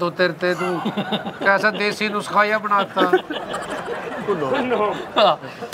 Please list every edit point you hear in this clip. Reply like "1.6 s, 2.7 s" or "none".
none